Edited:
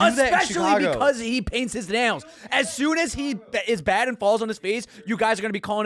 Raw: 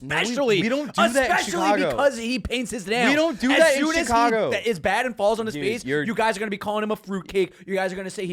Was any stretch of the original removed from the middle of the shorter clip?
no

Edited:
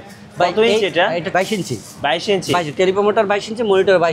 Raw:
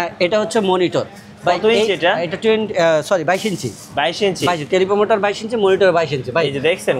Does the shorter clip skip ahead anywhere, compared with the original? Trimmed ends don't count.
yes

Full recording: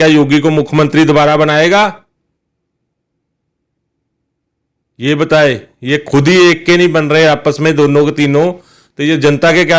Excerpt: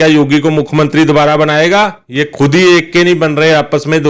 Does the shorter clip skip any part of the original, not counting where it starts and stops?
yes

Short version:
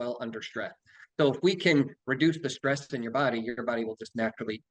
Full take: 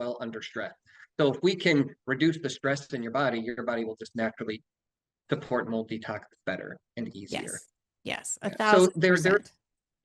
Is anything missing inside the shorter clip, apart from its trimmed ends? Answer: no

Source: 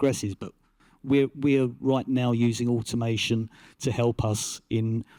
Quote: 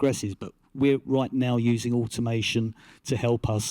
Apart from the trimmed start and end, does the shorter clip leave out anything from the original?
yes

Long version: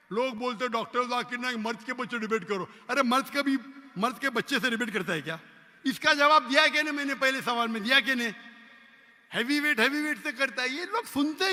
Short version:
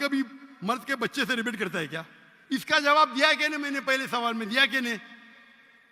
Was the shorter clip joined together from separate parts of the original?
no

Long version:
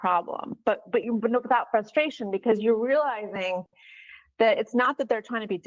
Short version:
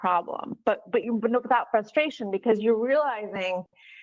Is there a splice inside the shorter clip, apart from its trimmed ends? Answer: no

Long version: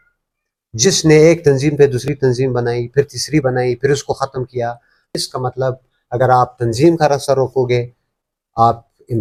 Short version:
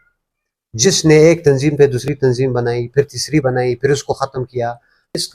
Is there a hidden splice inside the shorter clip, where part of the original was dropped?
no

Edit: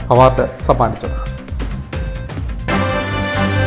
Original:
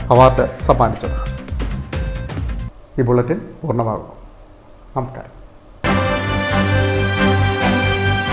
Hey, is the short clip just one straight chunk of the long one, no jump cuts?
no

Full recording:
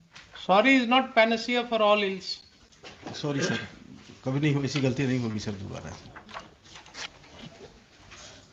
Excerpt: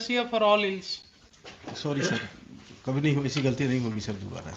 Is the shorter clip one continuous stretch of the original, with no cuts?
yes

